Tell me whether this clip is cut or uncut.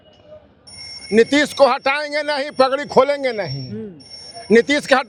uncut